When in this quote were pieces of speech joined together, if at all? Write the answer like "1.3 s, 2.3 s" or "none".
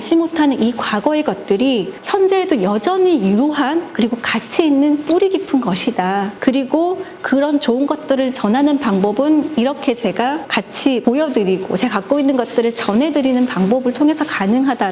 2.0 s, 6.3 s, 10.9 s